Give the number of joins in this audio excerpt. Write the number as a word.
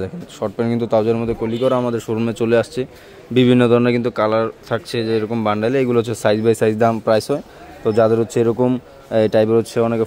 zero